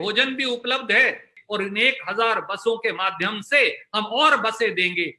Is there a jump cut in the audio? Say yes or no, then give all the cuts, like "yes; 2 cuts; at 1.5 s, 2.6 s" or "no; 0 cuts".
yes; 1 cut; at 1.4 s